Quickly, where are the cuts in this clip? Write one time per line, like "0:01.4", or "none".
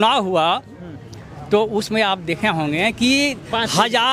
none